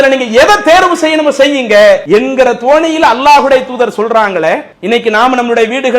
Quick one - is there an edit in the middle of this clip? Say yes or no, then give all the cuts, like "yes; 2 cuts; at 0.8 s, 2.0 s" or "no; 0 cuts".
yes; 2 cuts; at 2.0 s, 4.7 s